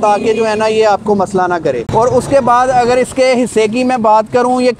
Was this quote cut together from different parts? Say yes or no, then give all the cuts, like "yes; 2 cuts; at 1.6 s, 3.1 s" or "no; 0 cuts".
yes; 1 cut; at 1.8 s